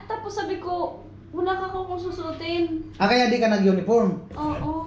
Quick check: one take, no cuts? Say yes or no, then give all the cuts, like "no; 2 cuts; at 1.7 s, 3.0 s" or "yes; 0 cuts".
yes; 0 cuts